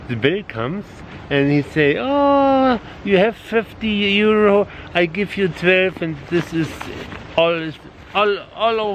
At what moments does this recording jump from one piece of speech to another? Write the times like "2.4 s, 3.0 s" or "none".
none